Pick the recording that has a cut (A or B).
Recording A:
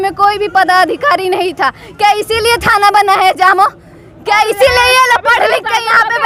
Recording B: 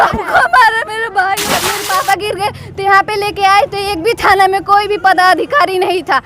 B